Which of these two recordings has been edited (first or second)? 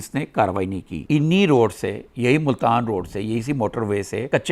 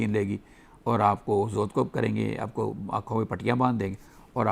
first